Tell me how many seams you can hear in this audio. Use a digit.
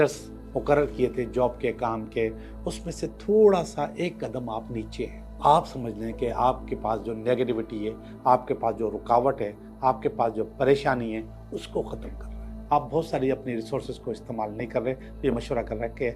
2